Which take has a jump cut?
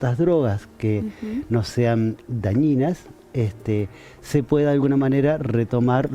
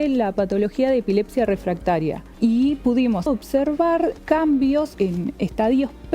second; 4 cuts; at 2.3 s, 3.2 s, 4.2 s, 4.9 s

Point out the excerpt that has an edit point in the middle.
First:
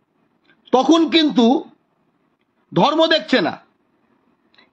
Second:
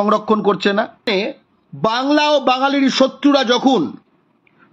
second; 1 cut; at 1.0 s

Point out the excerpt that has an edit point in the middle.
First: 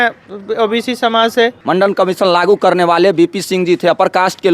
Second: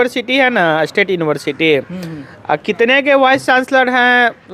first; 1 cut; at 1.6 s

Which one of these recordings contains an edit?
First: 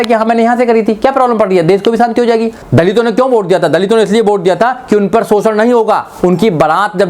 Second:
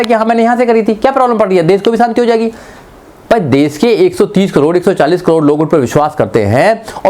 first; 1 cut; at 2.6 s

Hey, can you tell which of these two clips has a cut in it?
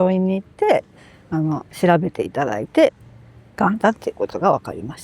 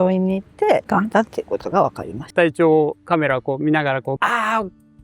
second; 3 cuts; at 0.8 s, 2.2 s, 4.2 s

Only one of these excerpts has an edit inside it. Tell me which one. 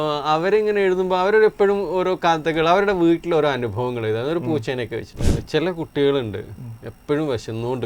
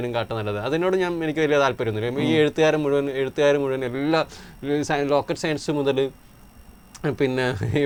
first; 1 cut; at 5.1 s

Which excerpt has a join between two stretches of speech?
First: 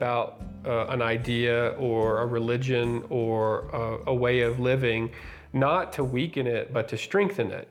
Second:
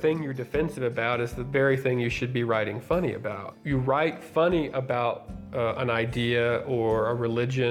second; 1 cut; at 3.5 s

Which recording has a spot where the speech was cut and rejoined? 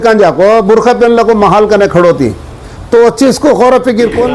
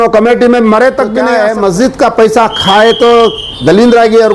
second; 1 cut; at 1.3 s

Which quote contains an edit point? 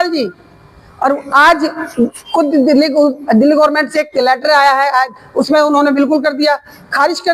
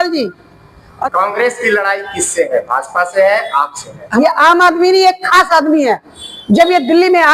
second; 2 cuts; at 0.9 s, 4.0 s

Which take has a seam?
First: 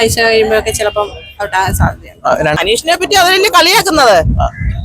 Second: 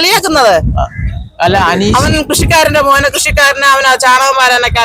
first; 1 cut; at 2.6 s

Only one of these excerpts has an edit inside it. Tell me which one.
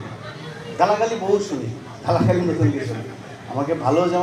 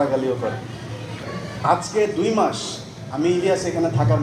second; 1 cut; at 1.1 s

